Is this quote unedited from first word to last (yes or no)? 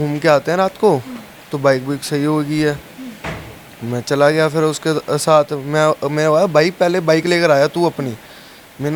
yes